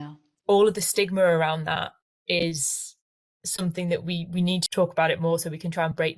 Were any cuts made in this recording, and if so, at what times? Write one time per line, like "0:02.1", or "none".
0:04.7